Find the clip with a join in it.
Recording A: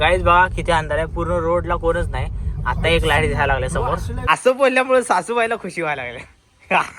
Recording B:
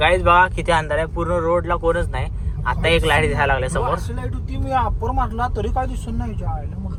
A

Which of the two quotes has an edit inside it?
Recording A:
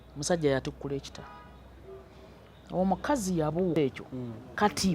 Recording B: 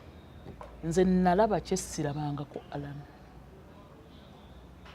A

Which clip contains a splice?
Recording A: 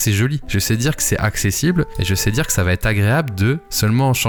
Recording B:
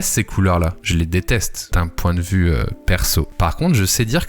B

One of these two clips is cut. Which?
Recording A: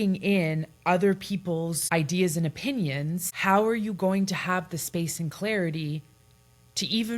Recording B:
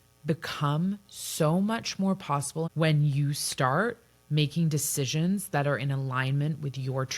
B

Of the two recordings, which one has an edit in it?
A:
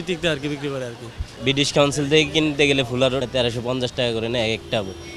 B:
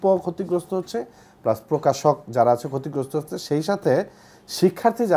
A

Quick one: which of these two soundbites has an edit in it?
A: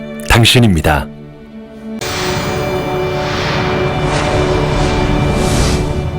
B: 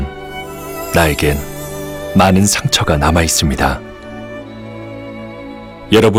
A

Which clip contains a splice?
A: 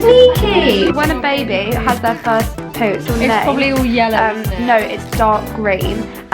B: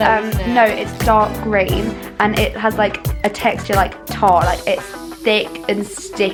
A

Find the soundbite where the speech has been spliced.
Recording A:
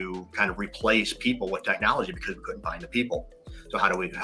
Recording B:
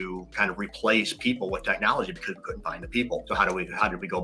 B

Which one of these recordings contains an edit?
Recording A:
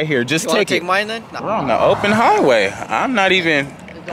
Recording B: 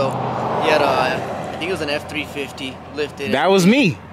A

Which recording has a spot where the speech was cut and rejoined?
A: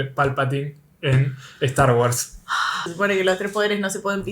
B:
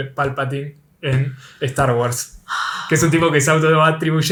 A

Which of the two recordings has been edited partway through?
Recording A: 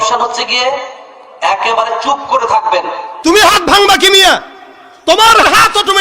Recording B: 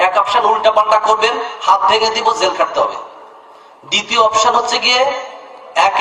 A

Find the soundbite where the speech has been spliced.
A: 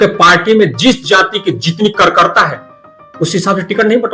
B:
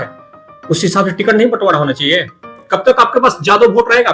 B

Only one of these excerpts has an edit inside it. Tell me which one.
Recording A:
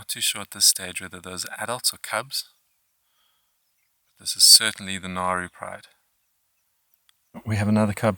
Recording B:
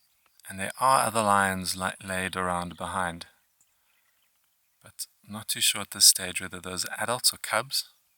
A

